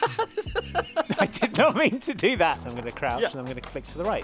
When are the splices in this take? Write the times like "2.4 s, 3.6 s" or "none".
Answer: 2.7 s